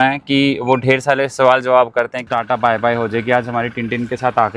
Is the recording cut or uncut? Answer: cut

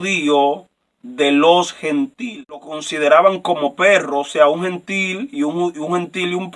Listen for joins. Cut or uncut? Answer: cut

